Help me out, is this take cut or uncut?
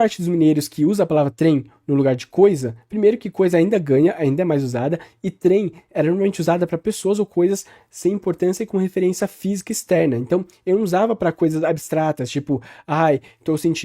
uncut